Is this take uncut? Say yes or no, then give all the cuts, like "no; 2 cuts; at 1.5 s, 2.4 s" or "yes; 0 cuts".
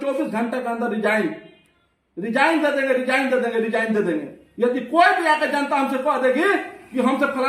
yes; 0 cuts